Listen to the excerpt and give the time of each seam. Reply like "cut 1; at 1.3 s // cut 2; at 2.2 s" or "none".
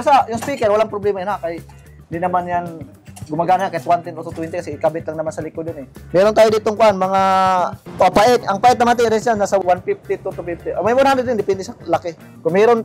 none